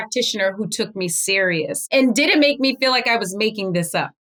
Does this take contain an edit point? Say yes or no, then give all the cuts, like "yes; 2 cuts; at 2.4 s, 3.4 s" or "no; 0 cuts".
no; 0 cuts